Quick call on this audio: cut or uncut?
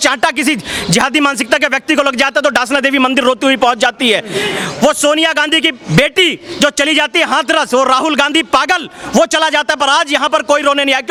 uncut